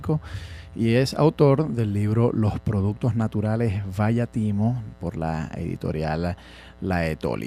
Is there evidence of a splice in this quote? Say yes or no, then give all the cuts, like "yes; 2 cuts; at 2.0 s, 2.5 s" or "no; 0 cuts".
yes; 1 cut; at 3.3 s